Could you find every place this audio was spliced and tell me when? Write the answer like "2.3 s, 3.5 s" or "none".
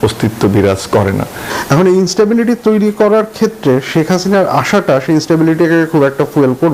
1.4 s